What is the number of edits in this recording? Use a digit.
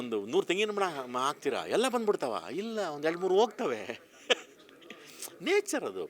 0